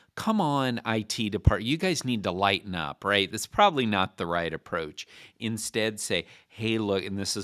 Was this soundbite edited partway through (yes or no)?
no